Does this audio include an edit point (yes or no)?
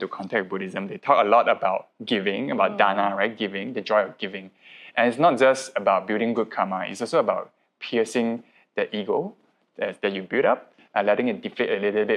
no